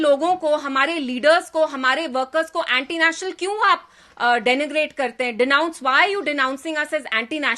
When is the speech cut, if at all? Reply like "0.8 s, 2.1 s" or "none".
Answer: none